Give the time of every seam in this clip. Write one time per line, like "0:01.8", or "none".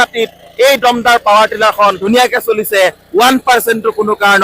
0:02.0

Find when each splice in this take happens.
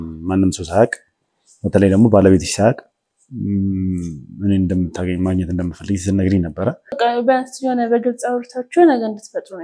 0:07.0

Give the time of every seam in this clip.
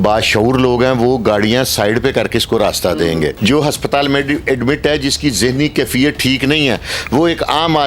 0:03.3

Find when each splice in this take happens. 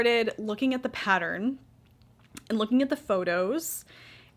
none

